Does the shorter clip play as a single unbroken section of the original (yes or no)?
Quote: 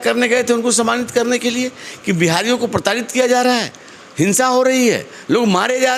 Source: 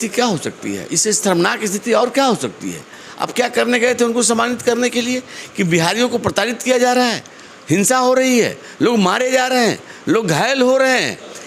yes